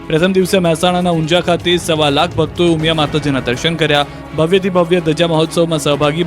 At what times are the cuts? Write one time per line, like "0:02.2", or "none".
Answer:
0:03.2

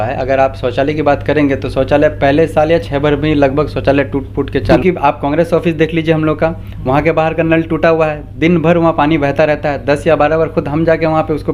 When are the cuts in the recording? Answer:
0:04.8

